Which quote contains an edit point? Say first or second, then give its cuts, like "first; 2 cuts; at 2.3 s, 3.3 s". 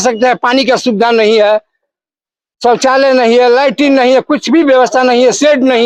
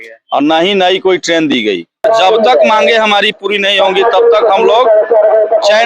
second; 1 cut; at 2.0 s